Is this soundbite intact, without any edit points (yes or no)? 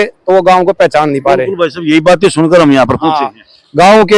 yes